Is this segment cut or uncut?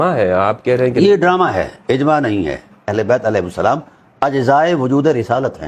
cut